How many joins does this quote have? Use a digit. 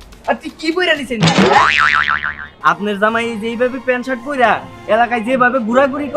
1